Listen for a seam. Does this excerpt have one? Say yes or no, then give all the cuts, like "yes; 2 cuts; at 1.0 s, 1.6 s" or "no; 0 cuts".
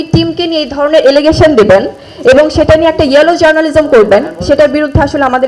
no; 0 cuts